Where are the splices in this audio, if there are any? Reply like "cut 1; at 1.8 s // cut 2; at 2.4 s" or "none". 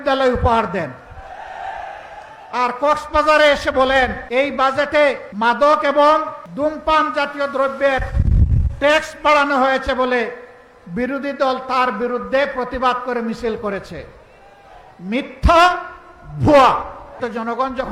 cut 1; at 4.2 s // cut 2; at 5.3 s // cut 3; at 6.4 s // cut 4; at 17.2 s